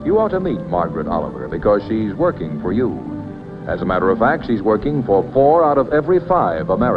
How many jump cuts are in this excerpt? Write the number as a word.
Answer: one